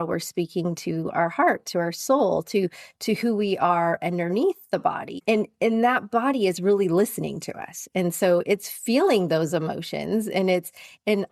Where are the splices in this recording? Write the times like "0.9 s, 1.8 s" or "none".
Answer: none